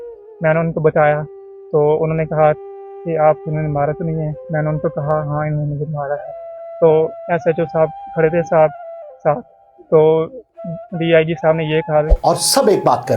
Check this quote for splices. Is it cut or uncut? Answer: cut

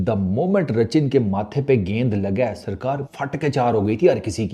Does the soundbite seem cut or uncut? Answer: cut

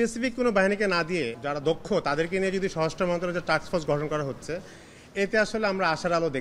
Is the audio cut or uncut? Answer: cut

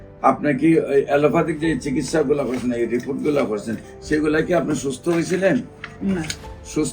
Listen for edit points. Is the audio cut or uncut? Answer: uncut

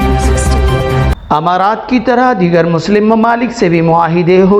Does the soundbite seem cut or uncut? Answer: uncut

